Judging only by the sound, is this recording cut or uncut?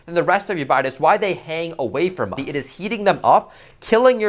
cut